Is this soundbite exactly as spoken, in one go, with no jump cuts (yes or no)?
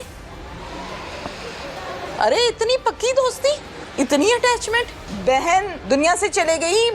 no